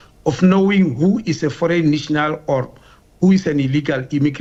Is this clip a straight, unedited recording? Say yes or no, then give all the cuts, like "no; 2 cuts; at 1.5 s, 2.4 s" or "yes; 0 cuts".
yes; 0 cuts